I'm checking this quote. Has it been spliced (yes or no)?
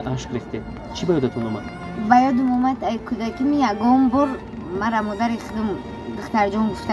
no